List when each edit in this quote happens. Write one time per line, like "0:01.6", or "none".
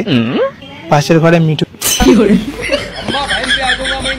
0:01.6